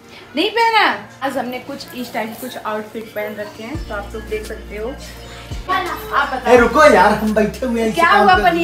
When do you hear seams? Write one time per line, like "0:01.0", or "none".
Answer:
0:01.2
0:05.7

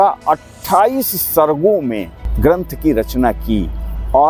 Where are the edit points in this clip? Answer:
none

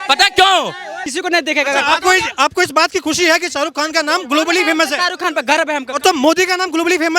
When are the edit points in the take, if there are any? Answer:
0:01.0

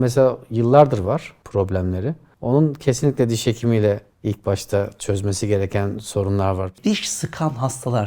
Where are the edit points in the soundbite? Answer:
0:01.4
0:02.3
0:06.7

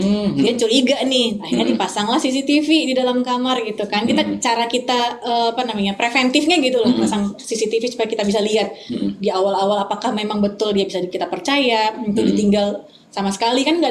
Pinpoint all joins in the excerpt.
none

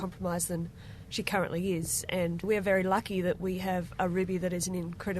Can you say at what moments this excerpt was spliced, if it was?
0:02.4

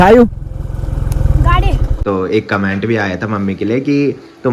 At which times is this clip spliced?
0:01.9

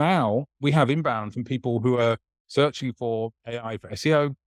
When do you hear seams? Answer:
none

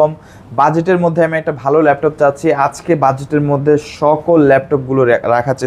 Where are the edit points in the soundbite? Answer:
none

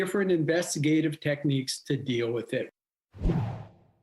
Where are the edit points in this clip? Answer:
0:02.8

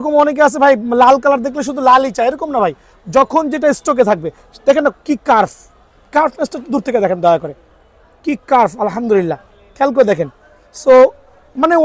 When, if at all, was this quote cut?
none

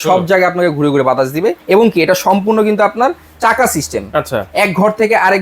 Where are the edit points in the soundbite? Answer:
0:01.6

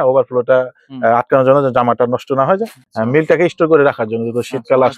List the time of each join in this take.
0:02.8

